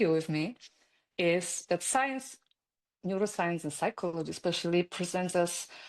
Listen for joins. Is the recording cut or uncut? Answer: uncut